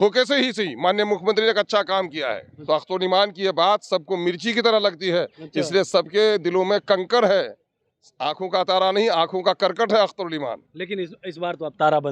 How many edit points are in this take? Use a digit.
1